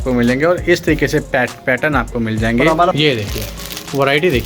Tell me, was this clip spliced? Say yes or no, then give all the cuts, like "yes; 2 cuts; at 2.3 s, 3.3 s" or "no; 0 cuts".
yes; 1 cut; at 3.0 s